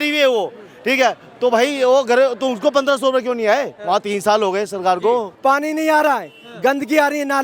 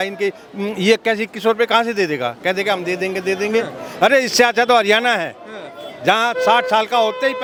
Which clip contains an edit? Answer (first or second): first